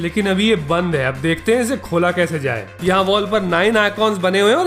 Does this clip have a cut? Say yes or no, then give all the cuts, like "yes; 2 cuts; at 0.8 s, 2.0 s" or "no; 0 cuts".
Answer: yes; 1 cut; at 2.7 s